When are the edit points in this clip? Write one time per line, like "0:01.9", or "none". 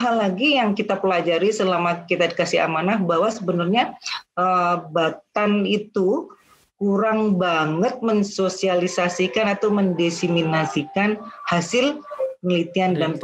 none